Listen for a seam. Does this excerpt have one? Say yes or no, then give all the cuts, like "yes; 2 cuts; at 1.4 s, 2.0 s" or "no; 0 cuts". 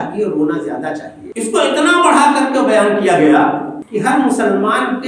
yes; 2 cuts; at 1.2 s, 3.8 s